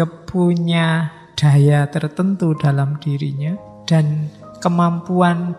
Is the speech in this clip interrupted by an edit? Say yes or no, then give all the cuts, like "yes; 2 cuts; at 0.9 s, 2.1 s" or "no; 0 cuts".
yes; 1 cut; at 3.7 s